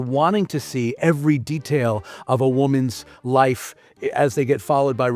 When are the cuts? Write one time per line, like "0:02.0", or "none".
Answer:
none